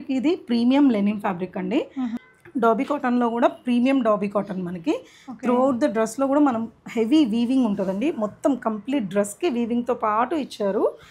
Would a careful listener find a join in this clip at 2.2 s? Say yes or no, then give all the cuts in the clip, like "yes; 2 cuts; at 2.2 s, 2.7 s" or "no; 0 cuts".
yes; 1 cut; at 2.2 s